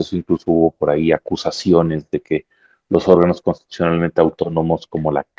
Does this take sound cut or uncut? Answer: uncut